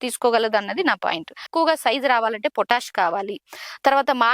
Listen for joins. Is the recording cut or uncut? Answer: cut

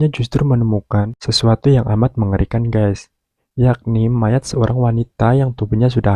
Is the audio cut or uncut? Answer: uncut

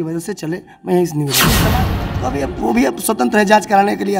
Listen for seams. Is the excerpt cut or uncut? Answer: cut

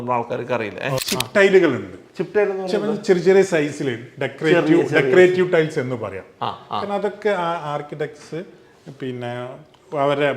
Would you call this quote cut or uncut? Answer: cut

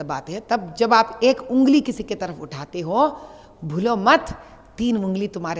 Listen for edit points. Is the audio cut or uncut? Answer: uncut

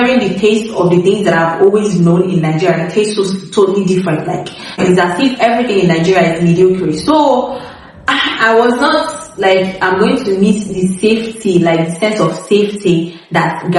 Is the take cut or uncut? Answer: uncut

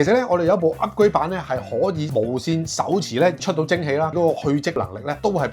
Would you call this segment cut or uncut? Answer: cut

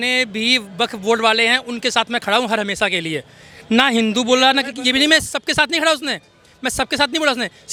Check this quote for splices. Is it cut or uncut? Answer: uncut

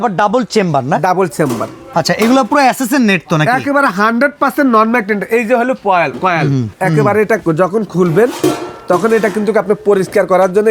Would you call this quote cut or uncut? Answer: cut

